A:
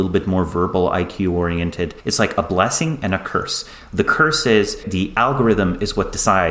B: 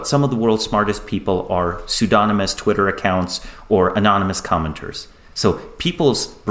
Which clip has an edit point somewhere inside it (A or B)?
A